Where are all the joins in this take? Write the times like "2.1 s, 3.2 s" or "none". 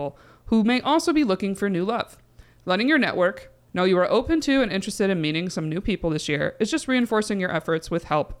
3.6 s